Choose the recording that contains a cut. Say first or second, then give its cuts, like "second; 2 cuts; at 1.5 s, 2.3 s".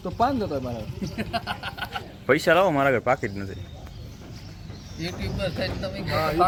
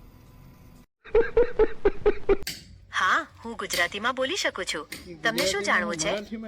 second; 2 cuts; at 1.0 s, 2.4 s